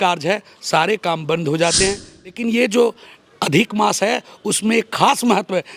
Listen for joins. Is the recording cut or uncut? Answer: cut